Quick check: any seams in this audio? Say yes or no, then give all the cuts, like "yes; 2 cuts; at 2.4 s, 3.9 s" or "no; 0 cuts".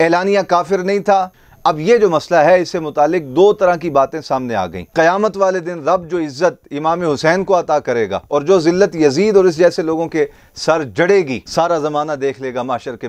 yes; 3 cuts; at 1.3 s, 4.8 s, 11.4 s